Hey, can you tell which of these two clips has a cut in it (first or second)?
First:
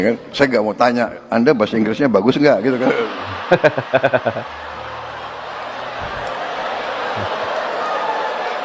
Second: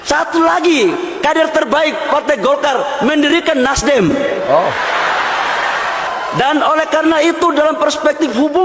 second